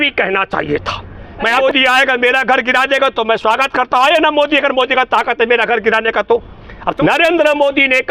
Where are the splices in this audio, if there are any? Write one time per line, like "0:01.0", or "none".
0:01.6
0:06.9